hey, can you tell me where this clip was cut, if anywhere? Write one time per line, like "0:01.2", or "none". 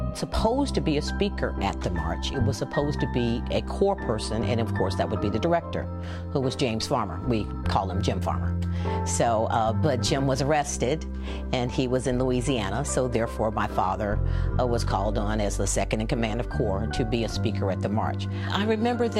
0:13.3